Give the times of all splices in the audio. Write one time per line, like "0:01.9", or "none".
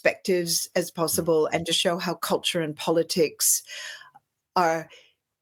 none